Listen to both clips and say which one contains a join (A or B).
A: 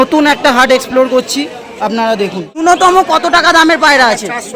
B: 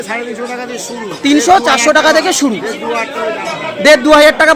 A